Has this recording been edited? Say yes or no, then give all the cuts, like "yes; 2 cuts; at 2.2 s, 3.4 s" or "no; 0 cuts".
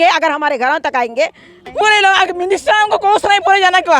yes; 1 cut; at 1.5 s